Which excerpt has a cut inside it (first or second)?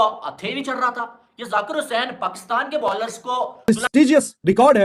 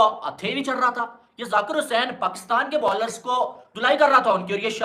first